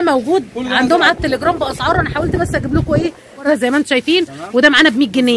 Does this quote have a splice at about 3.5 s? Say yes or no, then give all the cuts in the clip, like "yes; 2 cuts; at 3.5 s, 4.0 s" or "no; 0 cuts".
yes; 1 cut; at 3.5 s